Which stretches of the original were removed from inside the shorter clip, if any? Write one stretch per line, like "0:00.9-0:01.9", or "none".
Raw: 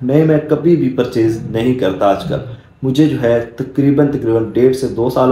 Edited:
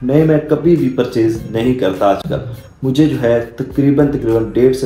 none